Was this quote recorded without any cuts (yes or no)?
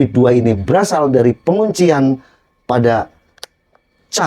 yes